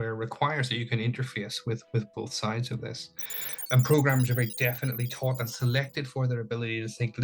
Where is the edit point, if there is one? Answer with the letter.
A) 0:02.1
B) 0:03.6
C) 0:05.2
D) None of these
B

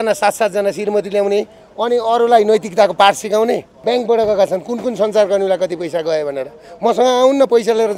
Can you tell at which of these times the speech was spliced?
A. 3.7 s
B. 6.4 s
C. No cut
A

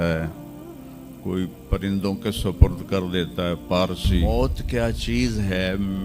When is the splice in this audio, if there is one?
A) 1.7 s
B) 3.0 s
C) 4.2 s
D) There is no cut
C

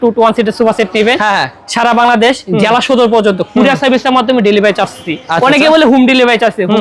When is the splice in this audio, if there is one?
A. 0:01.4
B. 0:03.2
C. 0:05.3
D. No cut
D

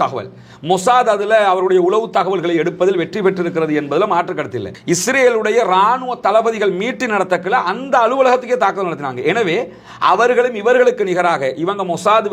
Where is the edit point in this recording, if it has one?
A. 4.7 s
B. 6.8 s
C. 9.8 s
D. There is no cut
A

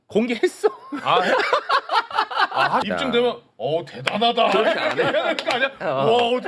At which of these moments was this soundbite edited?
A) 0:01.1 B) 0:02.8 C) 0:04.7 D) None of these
B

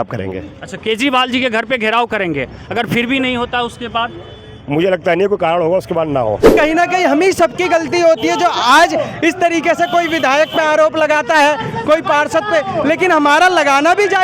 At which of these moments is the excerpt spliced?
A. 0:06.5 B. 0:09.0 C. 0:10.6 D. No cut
A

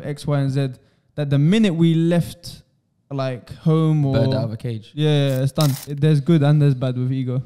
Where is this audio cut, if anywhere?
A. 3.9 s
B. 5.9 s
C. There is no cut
B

